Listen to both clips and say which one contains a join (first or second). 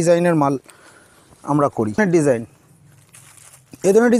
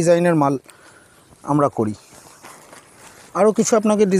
first